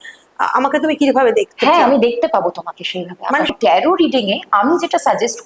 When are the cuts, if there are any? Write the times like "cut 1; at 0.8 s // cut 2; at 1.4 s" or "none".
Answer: cut 1; at 3.5 s

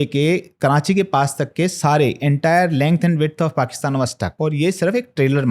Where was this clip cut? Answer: cut 1; at 4.2 s

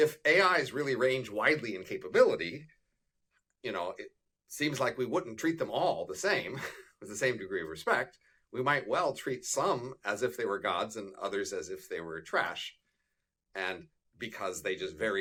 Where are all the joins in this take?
none

